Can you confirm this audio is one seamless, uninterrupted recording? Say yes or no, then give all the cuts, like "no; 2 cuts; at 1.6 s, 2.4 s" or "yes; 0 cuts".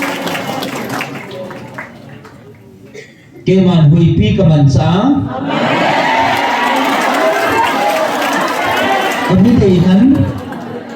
no; 1 cut; at 2.4 s